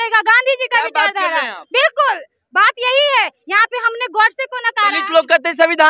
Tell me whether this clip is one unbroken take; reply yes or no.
yes